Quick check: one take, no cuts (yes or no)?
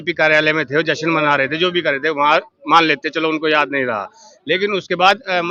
yes